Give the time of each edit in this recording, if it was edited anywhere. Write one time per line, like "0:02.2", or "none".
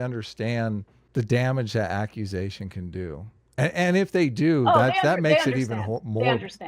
0:01.0